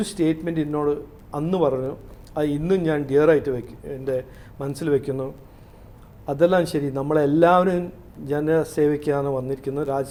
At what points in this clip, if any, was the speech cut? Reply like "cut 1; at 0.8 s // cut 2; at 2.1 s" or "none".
none